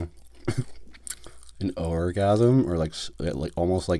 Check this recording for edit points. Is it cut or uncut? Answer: uncut